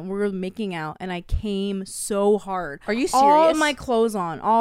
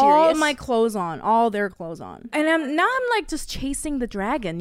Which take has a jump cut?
second; 1 cut; at 2.3 s

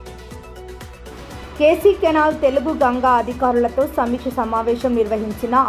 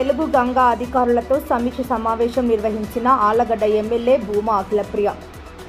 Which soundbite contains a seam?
first; 1 cut; at 1.1 s

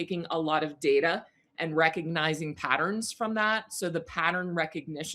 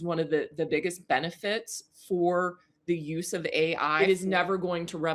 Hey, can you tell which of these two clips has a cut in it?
second; 1 cut; at 4.0 s

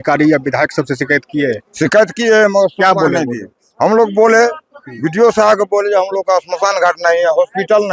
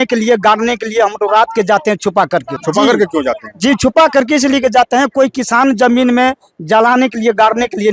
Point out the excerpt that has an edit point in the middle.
second; 1 cut; at 2.6 s

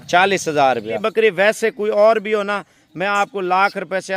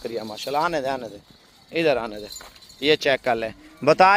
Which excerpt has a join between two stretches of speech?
first; 1 cut; at 1.1 s

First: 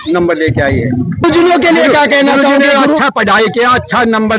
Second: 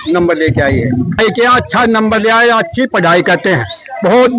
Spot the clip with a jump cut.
second; 1 cut; at 1.2 s

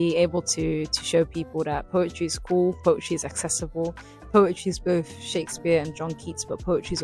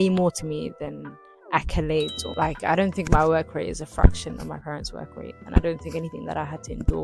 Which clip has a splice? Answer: second; 1 cut; at 2.2 s

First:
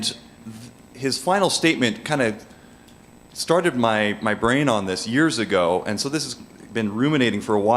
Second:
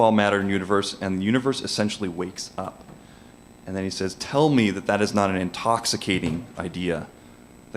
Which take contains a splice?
first; 1 cut; at 1.0 s

